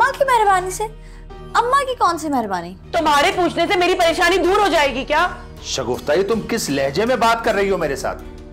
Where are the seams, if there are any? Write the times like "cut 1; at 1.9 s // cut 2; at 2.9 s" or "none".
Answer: cut 1; at 2.8 s